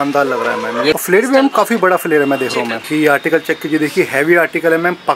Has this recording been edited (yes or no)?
yes